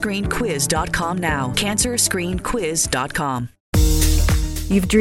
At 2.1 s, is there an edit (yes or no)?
no